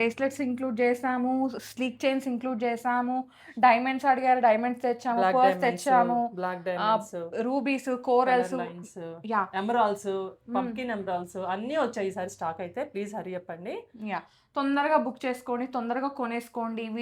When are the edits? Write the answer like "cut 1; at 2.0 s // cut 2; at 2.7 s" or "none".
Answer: none